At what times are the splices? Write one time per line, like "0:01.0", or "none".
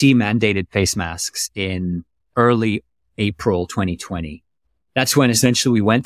0:02.3

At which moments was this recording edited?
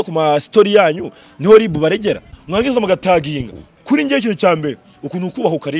0:02.3

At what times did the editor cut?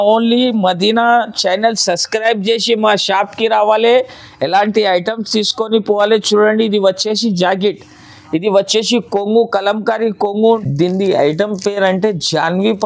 0:10.3

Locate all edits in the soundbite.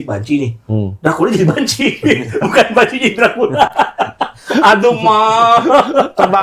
none

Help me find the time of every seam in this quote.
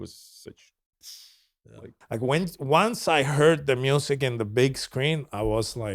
0:01.9

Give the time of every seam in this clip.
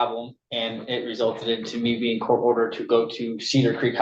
none

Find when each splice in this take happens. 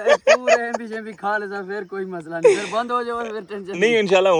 none

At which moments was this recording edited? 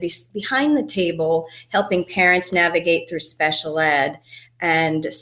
none

